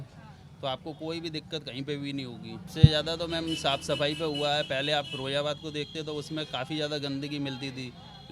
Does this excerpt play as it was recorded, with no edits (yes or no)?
no